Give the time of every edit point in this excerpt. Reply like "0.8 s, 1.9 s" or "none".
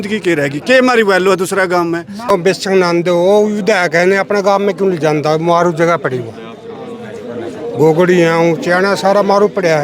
2.3 s